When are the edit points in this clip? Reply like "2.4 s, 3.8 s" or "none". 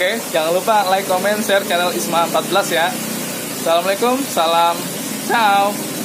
none